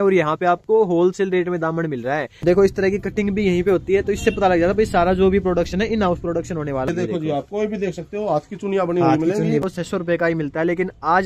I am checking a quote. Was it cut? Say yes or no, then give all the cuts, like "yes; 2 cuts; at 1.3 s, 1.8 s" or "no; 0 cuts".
yes; 3 cuts; at 2.3 s, 6.9 s, 9.6 s